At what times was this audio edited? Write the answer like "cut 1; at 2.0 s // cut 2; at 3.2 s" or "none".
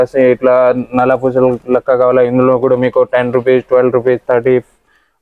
none